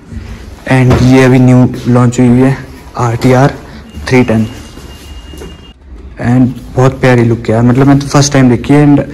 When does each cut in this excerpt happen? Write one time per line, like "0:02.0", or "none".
0:05.7